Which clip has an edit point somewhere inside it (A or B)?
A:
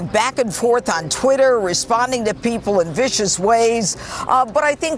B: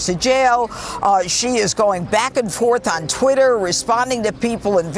A